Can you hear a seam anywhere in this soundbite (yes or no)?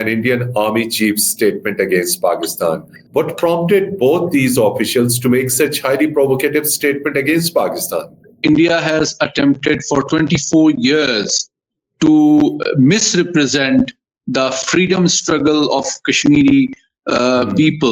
yes